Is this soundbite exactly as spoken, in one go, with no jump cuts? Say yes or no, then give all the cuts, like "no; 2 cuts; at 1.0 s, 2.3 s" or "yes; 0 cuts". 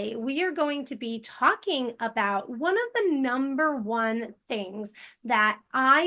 yes; 0 cuts